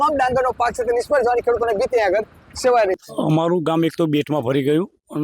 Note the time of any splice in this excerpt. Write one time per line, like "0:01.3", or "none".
0:03.0